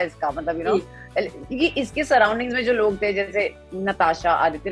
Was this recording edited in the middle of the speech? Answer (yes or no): no